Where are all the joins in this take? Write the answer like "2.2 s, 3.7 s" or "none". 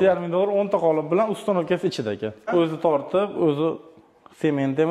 2.5 s

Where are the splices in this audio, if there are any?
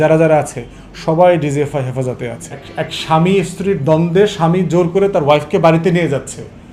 2.6 s

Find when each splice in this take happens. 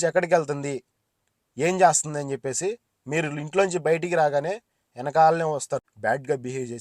5.8 s

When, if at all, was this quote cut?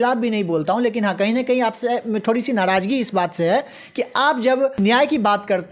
4.7 s

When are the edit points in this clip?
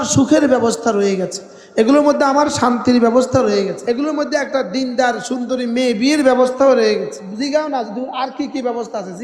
3.8 s, 7.2 s

